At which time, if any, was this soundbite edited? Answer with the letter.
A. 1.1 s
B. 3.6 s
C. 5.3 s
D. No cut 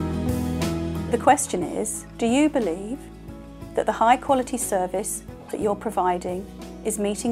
A